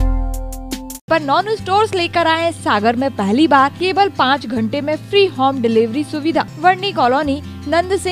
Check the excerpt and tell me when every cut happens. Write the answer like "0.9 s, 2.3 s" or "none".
1.1 s, 3.8 s, 6.5 s